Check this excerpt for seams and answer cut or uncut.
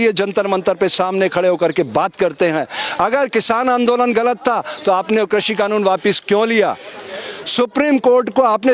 uncut